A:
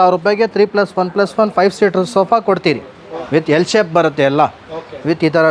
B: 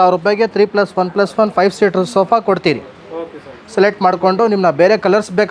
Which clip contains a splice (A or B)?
A